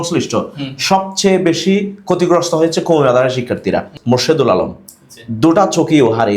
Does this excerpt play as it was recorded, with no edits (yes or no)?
no